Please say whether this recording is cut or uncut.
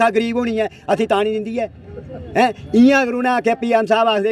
uncut